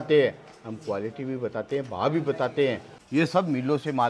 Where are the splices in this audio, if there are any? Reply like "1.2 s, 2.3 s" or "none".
2.9 s